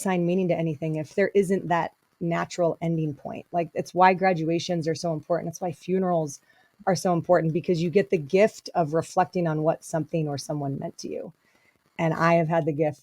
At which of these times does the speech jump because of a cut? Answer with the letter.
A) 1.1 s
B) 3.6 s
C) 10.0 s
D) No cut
A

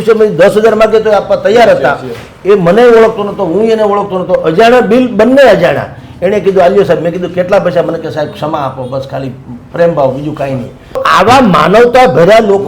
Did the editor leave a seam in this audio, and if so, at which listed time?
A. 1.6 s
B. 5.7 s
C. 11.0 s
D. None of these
C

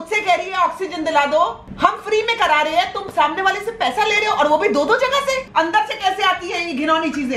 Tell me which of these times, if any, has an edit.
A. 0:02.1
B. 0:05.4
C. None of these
B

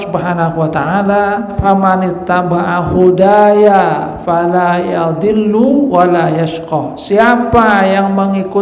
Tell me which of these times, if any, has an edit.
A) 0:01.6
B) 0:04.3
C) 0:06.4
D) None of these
A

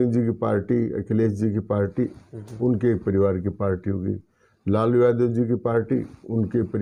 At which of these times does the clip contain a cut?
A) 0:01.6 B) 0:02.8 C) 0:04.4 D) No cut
D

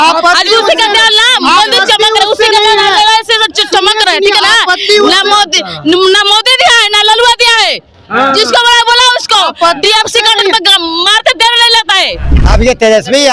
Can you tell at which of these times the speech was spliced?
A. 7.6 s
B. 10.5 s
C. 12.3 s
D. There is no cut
C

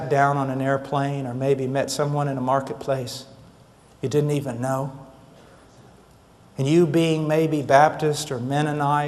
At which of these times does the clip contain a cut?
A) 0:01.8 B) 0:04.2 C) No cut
A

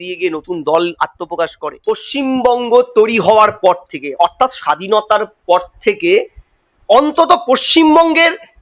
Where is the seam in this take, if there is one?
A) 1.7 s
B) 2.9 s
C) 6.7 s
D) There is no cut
A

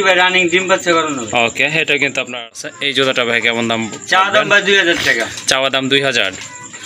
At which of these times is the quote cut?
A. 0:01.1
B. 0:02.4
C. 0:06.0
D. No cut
B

